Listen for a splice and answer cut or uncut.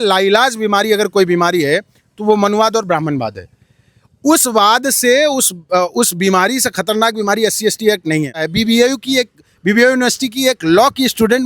cut